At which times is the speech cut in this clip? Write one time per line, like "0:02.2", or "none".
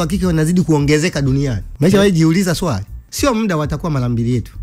0:01.7
0:03.0